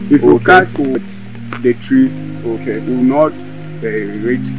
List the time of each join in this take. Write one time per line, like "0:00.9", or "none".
0:01.0